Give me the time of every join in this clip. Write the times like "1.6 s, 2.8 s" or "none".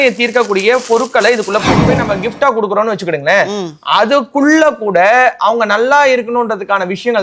1.9 s